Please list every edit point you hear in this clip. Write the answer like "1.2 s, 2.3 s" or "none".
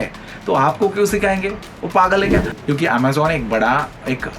2.5 s